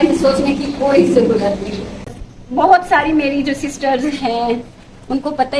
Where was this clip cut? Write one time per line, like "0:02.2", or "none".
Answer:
0:02.1